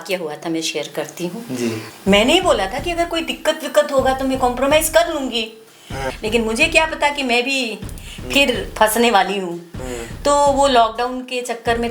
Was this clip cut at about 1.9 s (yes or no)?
yes